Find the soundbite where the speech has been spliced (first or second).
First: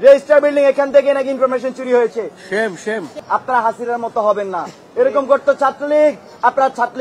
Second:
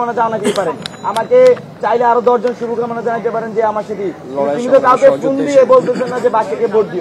first